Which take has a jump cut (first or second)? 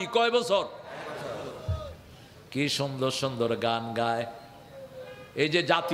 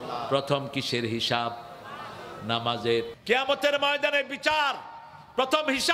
second